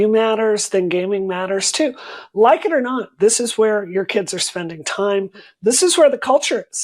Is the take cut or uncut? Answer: cut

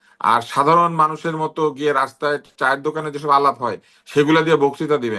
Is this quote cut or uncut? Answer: uncut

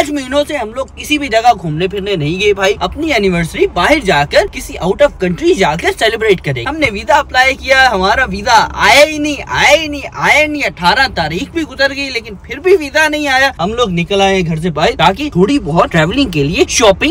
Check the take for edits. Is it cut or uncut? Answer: cut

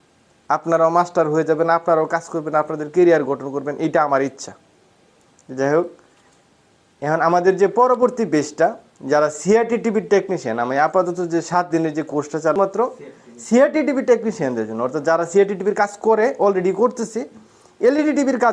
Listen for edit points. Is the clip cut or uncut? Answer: cut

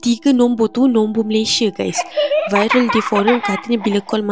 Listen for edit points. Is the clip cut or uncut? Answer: uncut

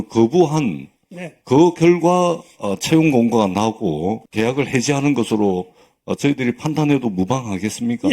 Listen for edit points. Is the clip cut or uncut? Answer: cut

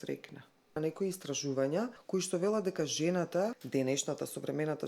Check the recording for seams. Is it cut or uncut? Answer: cut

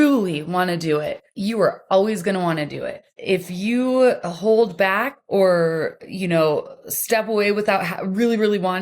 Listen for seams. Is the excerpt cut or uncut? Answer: cut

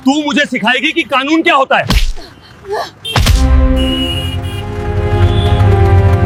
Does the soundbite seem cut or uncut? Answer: uncut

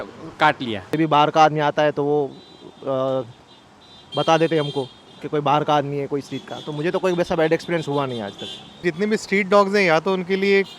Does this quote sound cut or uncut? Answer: cut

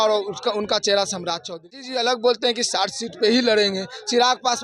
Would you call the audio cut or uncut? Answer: cut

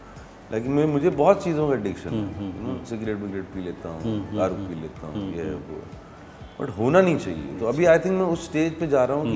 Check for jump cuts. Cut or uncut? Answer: uncut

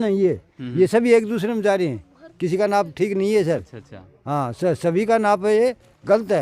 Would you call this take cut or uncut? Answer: uncut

